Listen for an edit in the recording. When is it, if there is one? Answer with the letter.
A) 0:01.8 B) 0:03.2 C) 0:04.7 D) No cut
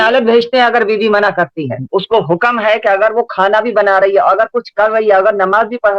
A